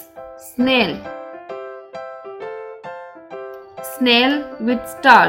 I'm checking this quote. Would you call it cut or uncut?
cut